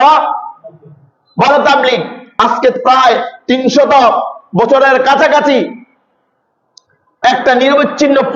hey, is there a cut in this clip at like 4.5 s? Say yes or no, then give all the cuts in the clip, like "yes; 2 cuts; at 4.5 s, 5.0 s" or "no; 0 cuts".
no; 1 cut; at 2.3 s